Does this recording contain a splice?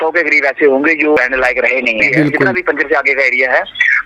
yes; 2 cuts; at 1.2 s, 2.5 s

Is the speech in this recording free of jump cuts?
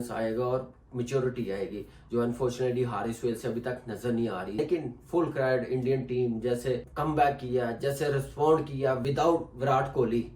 no; 3 cuts; at 4.6 s, 6.9 s, 9.0 s

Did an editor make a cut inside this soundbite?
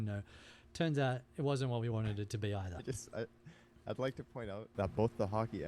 yes; 1 cut; at 4.7 s

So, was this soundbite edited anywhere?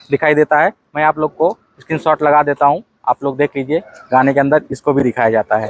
no; 0 cuts

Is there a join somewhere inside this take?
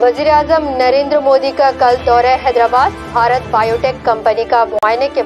yes; 1 cut; at 2.5 s

